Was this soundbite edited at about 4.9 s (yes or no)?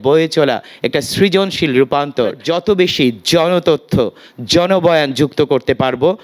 no